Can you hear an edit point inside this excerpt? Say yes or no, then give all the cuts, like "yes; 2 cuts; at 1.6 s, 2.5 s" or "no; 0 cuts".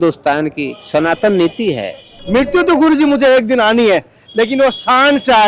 yes; 1 cut; at 2.2 s